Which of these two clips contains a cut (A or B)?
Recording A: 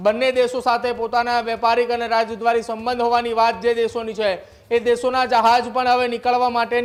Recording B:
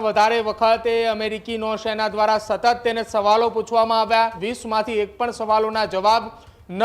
B